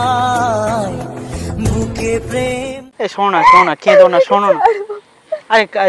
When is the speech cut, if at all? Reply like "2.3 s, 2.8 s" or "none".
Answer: 2.7 s

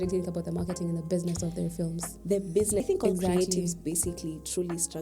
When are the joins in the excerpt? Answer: 2.8 s

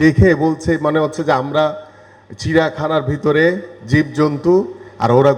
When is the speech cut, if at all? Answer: none

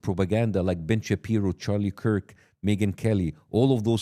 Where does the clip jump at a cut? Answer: none

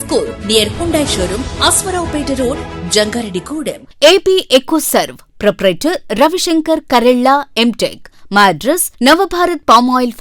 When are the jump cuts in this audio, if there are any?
3.9 s

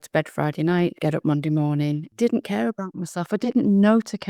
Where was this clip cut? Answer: 1.0 s, 2.1 s

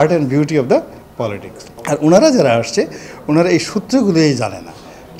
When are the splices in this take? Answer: none

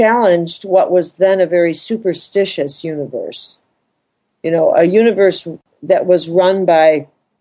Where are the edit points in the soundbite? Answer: none

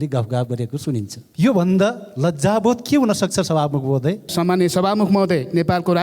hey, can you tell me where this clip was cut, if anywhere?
1.2 s, 4.3 s

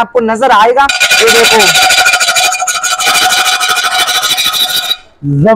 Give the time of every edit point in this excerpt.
none

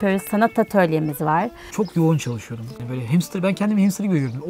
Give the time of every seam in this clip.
1.6 s, 2.8 s

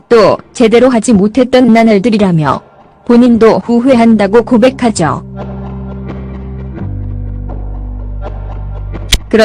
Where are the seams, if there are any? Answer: 6.9 s

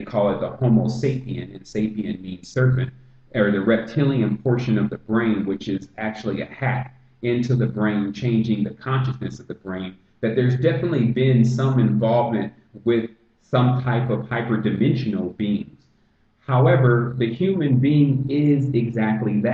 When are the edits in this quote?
17.6 s

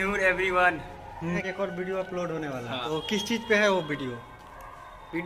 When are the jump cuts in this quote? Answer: 1.4 s, 2.8 s

